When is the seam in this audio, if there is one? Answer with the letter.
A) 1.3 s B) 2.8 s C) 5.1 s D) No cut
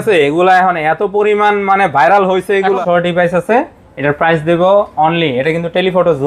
B